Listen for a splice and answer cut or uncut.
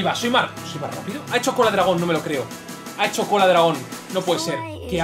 uncut